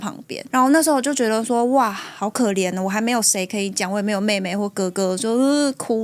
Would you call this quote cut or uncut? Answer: uncut